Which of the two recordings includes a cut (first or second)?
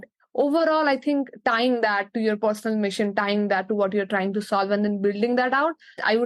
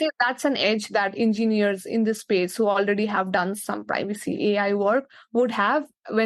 second